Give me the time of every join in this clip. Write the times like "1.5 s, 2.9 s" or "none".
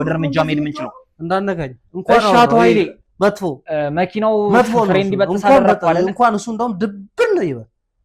none